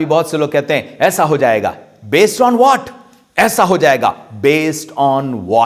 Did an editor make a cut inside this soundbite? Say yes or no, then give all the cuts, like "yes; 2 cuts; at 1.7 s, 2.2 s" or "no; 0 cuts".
no; 0 cuts